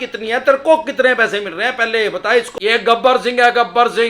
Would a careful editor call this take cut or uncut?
cut